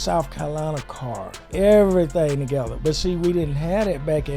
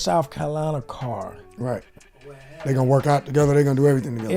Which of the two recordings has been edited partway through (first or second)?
first